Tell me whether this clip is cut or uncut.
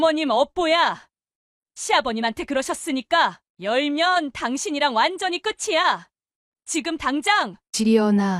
cut